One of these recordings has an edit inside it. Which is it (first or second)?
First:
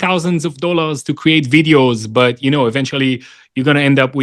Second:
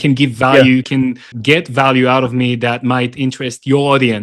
second